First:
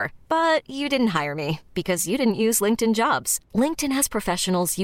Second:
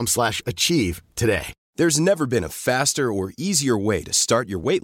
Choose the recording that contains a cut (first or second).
second